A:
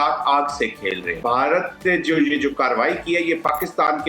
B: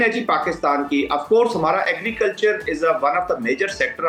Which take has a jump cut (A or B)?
A